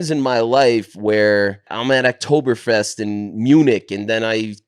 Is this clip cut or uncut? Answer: cut